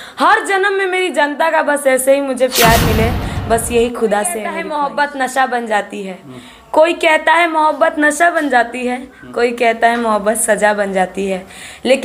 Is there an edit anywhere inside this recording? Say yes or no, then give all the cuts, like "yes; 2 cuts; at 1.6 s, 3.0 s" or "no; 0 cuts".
yes; 1 cut; at 4.6 s